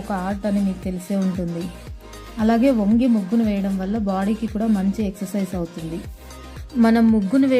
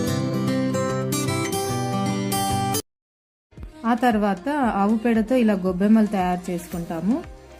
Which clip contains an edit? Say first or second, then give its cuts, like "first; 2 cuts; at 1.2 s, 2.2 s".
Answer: second; 1 cut; at 2.0 s